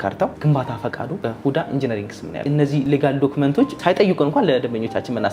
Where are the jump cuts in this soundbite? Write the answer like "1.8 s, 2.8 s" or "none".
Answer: 1.1 s, 2.7 s, 3.8 s